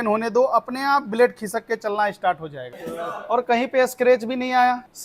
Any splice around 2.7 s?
yes; 1 cut; at 2.7 s

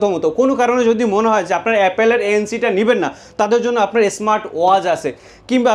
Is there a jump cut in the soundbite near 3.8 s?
no; 0 cuts

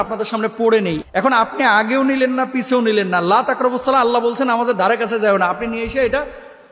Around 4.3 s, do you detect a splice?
no; 1 cut; at 1.0 s

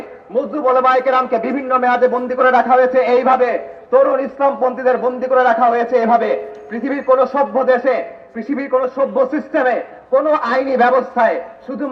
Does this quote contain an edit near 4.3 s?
no; 0 cuts

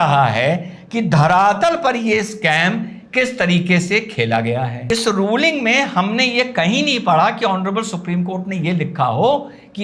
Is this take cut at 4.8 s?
yes; 1 cut; at 4.8 s

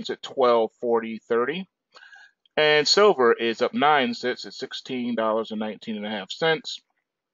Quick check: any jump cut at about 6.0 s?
no; 1 cut; at 3.7 s

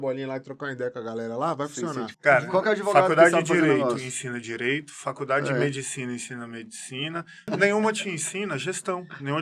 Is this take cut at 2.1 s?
yes; 2 cuts; at 2.1 s, 7.5 s

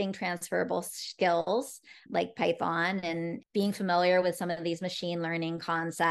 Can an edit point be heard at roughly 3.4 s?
yes; 2 cuts; at 2.0 s, 3.4 s

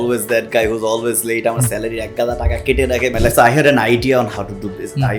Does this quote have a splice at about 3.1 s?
yes; 1 cut; at 3.1 s

